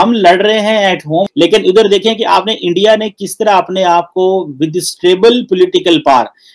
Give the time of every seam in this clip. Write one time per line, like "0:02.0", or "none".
0:01.3